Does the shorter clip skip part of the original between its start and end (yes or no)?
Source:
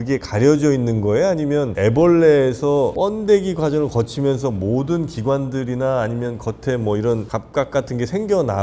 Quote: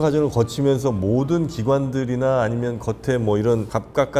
no